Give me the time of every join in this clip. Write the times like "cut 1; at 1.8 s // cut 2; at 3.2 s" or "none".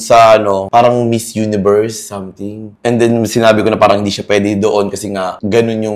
none